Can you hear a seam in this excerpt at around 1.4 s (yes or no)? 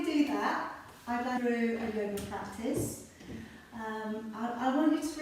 yes